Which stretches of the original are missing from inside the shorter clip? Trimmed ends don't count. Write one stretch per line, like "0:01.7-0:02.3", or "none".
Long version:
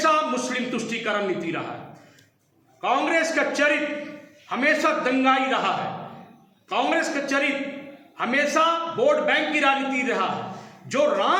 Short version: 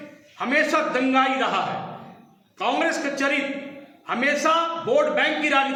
none